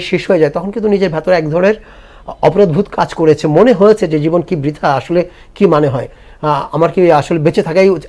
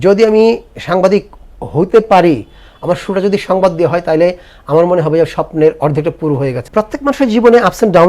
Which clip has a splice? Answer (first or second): second